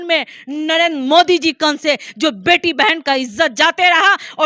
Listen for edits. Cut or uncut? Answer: uncut